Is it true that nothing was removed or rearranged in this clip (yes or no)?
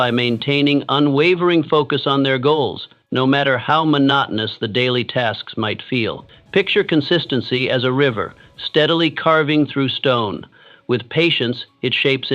no